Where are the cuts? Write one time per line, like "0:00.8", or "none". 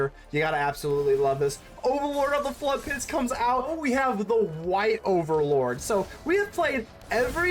0:03.7

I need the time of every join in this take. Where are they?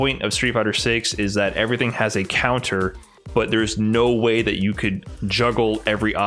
none

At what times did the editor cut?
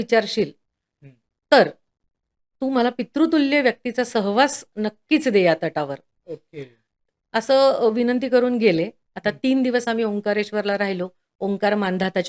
none

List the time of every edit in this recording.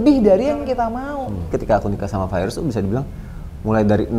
0:01.5

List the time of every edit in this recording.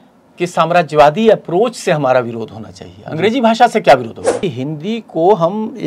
0:04.4

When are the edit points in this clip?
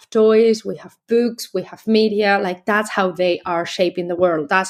none

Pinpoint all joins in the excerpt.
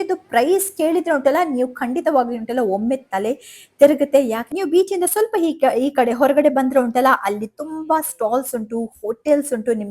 0:04.4

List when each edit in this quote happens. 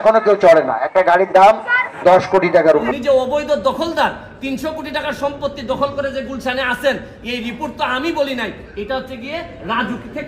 0:02.9

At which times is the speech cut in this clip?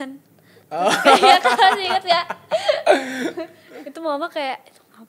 0:03.6

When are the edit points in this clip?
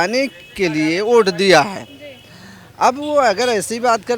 none

